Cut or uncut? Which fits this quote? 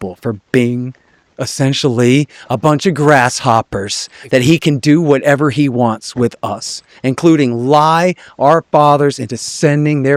uncut